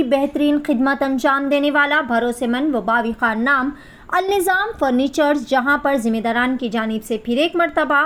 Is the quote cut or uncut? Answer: uncut